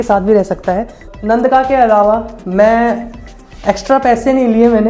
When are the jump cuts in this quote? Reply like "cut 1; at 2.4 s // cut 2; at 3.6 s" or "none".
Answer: cut 1; at 1.1 s